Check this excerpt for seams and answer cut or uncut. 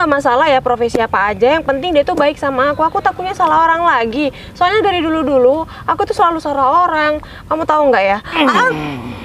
uncut